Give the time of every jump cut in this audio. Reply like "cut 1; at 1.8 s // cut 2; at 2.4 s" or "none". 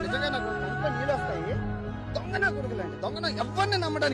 none